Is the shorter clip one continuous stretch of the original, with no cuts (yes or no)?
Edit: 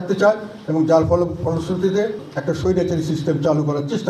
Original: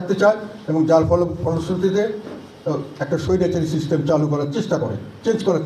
no